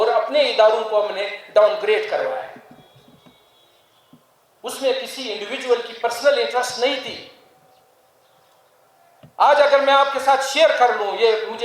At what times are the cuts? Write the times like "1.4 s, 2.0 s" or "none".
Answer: none

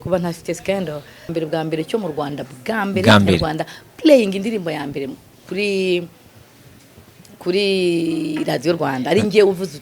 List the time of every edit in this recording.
1.3 s

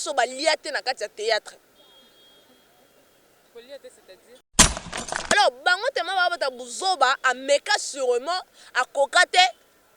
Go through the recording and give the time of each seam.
4.8 s

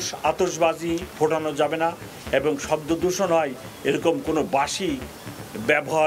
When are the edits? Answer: none

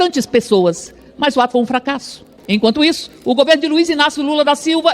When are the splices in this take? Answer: 2.3 s

